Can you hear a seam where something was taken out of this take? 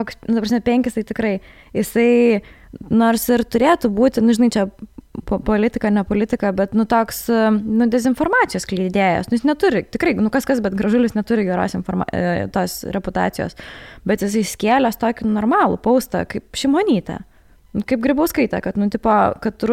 no; 0 cuts

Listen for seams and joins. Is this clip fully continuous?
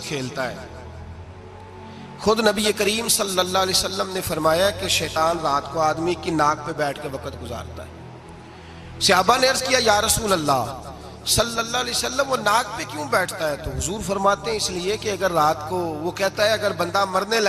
no; 1 cut; at 2.1 s

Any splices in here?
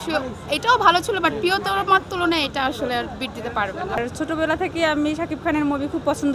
yes; 1 cut; at 4.0 s

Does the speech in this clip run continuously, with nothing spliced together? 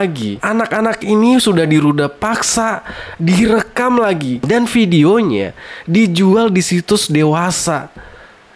yes; 0 cuts

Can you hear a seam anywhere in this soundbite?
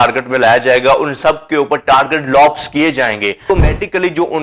yes; 1 cut; at 3.4 s

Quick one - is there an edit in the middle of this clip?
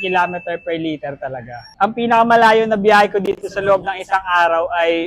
yes; 1 cut; at 1.6 s

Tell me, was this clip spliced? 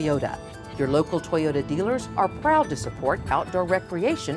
no; 0 cuts

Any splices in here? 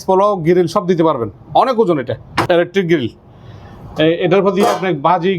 yes; 1 cut; at 2.5 s

